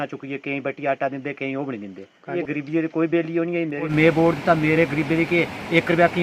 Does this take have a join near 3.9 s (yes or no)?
yes